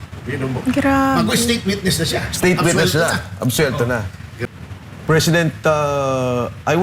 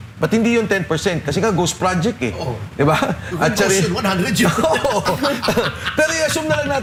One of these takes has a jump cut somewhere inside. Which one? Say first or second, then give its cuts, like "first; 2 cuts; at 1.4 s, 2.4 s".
first; 1 cut; at 4.3 s